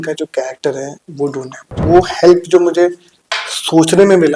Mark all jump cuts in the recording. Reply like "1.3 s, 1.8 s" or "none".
1.8 s